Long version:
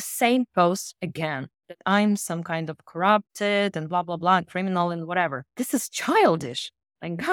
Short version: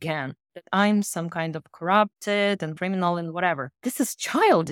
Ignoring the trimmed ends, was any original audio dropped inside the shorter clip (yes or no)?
yes